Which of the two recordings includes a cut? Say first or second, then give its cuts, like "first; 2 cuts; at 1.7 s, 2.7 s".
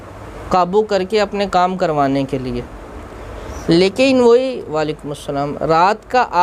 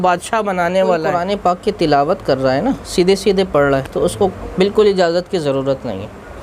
second; 1 cut; at 1.1 s